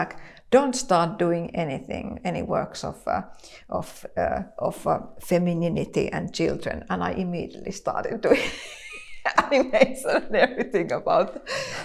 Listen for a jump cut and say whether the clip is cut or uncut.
uncut